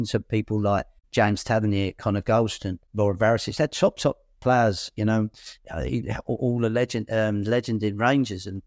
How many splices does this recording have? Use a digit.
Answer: 2